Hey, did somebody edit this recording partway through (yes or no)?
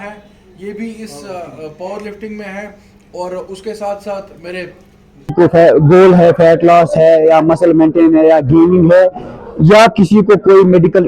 yes